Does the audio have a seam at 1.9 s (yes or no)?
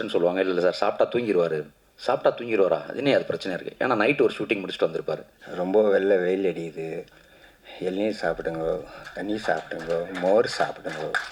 no